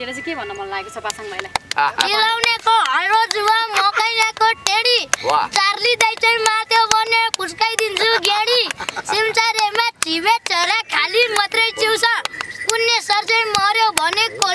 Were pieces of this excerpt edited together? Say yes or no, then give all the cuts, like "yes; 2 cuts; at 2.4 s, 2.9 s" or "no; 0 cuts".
no; 0 cuts